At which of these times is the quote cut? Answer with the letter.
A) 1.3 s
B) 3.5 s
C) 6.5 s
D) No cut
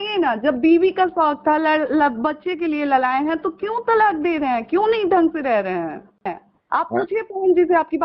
C